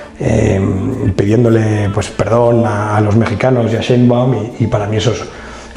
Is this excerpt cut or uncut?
uncut